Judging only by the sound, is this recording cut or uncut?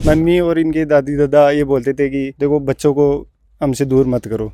uncut